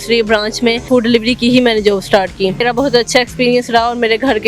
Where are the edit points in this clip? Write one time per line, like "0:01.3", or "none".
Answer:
0:00.8
0:02.6